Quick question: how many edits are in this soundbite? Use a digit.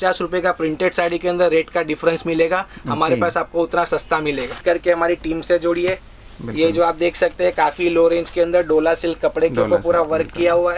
1